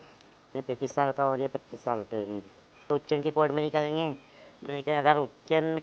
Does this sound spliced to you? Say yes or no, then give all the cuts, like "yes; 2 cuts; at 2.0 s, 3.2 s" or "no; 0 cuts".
yes; 1 cut; at 2.9 s